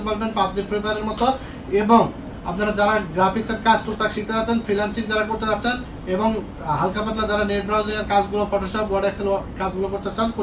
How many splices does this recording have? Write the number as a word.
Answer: zero